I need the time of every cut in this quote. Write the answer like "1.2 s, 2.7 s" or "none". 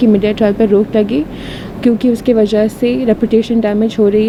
none